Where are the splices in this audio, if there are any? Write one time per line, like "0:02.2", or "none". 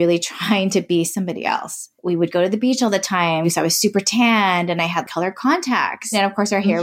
0:01.9
0:03.5
0:06.1